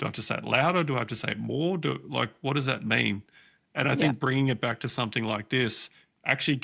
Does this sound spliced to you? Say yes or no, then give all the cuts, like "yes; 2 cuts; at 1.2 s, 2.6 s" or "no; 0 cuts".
no; 0 cuts